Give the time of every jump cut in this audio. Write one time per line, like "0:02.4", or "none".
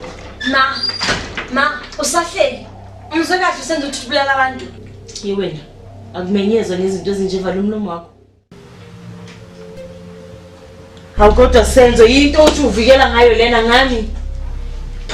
0:08.5